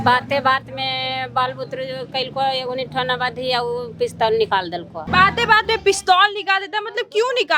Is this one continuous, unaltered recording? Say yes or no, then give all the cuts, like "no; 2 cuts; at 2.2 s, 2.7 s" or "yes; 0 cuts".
yes; 0 cuts